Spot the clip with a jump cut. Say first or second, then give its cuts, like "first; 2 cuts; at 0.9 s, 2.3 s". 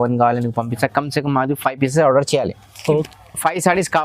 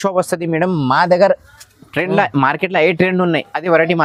first; 1 cut; at 3.1 s